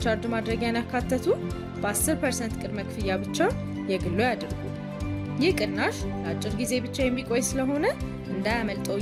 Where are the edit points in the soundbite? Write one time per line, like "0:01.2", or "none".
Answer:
none